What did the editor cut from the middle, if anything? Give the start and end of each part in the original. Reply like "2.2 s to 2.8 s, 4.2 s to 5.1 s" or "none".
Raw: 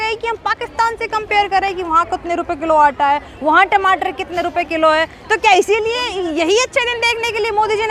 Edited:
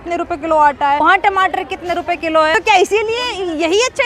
3.2 s to 3.5 s, 5.0 s to 5.3 s